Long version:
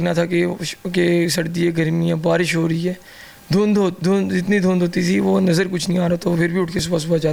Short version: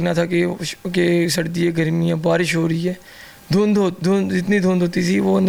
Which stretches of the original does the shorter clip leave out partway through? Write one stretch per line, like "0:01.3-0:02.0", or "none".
none